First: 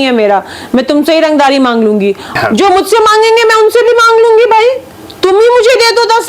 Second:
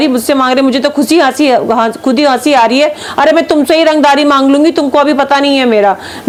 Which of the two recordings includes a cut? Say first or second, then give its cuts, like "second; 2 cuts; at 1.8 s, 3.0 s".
first; 1 cut; at 2.3 s